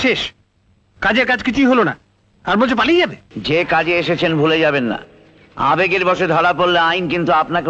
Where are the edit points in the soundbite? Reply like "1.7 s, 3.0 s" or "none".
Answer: 3.3 s

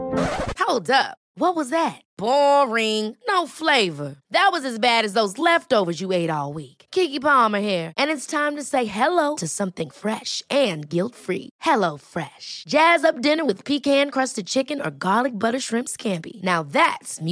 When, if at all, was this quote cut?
none

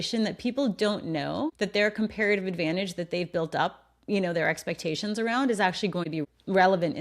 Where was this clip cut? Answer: 1.5 s, 6.1 s

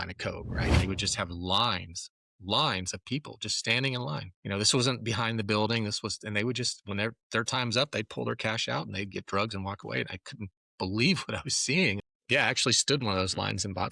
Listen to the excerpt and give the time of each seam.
0.7 s, 4.3 s, 12.0 s

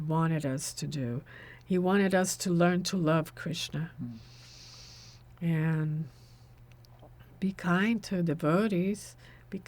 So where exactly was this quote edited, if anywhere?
none

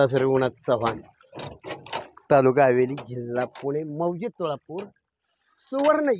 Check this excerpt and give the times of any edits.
none

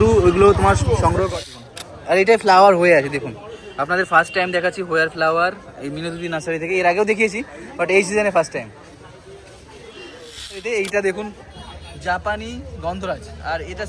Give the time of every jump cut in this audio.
1.3 s, 10.6 s

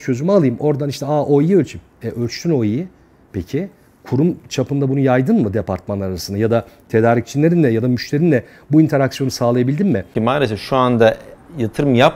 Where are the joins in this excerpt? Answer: 10.1 s

